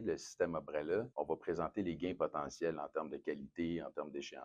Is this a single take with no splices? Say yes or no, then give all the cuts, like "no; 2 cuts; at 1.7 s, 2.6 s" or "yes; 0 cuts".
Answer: no; 1 cut; at 1.1 s